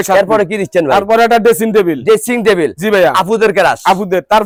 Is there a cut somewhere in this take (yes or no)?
no